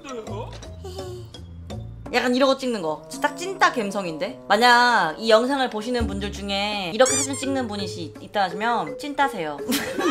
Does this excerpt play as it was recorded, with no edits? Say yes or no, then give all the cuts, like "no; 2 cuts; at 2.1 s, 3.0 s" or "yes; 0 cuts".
yes; 0 cuts